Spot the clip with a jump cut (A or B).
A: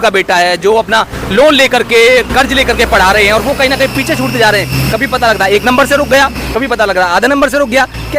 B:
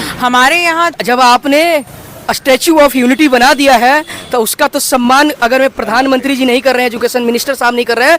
B